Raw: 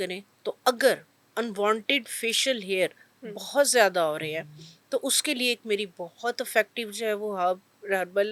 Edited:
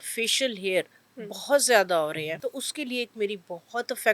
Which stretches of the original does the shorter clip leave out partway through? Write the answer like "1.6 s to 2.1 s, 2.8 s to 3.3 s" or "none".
4.4 s to 4.9 s